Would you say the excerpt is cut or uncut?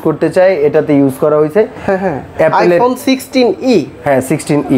uncut